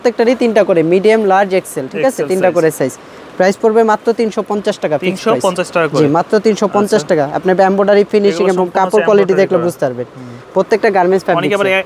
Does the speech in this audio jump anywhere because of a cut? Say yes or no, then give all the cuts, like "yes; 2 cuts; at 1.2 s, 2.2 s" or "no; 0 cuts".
no; 0 cuts